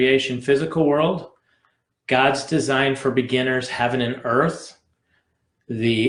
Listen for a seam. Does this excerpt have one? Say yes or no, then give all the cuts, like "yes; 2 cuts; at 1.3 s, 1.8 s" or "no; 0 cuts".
no; 0 cuts